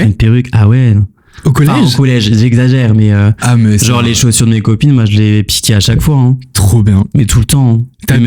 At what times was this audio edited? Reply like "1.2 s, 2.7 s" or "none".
none